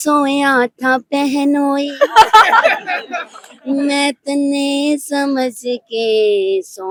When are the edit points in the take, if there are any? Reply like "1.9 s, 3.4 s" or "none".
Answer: none